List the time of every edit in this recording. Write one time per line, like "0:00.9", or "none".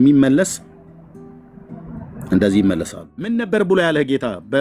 0:03.3